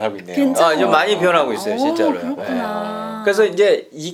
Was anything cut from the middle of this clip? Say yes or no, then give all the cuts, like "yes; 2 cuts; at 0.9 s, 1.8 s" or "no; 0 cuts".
no; 0 cuts